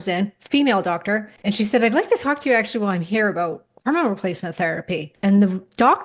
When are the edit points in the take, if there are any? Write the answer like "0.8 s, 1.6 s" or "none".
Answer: 1.3 s, 5.1 s